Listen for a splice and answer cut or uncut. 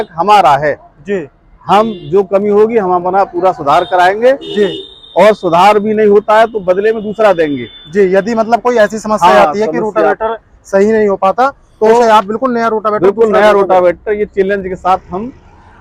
uncut